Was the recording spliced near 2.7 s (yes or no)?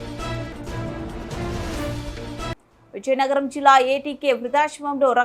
no